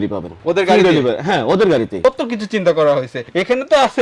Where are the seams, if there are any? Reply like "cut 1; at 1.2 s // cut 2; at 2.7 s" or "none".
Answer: cut 1; at 2.0 s